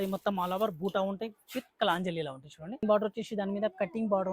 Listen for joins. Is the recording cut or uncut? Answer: cut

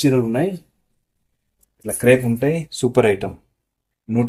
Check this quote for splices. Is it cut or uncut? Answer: uncut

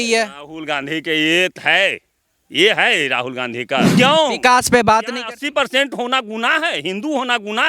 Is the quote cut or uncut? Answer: cut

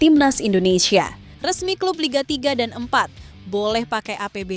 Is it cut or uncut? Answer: cut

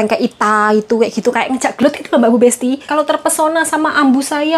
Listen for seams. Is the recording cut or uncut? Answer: cut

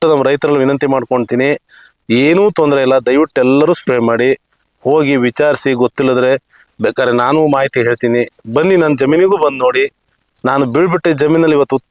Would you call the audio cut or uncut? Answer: uncut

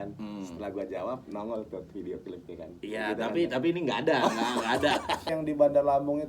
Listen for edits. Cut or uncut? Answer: cut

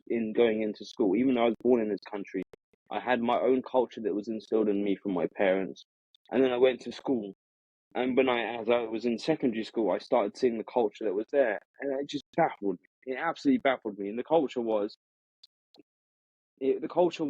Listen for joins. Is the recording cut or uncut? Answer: uncut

